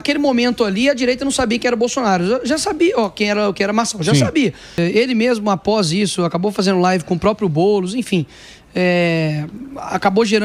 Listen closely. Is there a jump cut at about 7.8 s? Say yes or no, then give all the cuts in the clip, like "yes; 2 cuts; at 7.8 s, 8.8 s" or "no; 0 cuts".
no; 1 cut; at 4.8 s